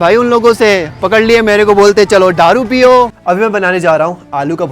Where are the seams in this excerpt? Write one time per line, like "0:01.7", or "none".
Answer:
0:03.2